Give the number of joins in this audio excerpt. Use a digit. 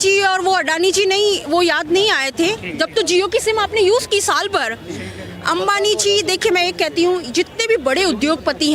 0